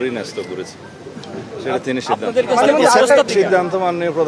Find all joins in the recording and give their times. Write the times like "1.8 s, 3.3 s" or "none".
3.3 s